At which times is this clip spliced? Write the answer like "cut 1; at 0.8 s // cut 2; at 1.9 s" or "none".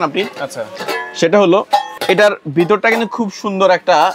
cut 1; at 1.9 s